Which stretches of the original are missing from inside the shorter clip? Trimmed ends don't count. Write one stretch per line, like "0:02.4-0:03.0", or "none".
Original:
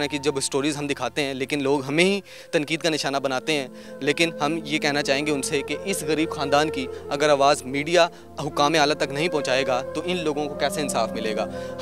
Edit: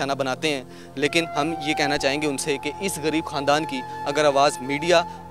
none